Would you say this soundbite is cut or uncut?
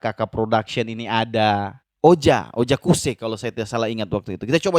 cut